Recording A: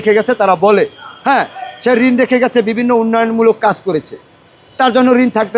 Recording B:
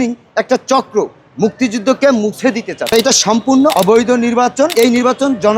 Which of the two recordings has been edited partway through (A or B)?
B